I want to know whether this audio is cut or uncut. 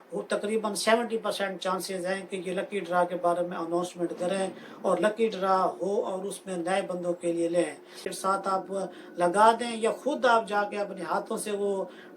cut